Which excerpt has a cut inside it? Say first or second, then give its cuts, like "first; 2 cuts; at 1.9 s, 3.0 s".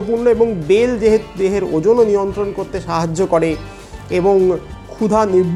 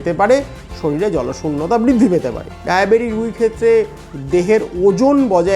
second; 1 cut; at 2.5 s